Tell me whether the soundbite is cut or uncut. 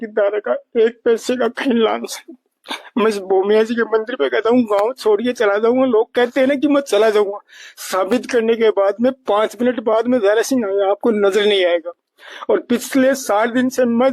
cut